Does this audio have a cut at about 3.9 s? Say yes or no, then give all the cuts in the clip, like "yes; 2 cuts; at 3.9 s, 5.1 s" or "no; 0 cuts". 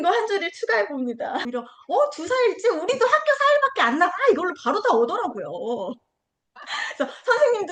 no; 1 cut; at 1.5 s